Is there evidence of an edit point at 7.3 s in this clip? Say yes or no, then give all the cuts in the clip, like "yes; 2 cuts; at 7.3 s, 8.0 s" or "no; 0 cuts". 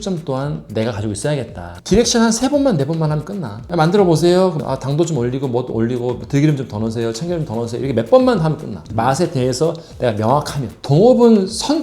no; 2 cuts; at 1.9 s, 10.7 s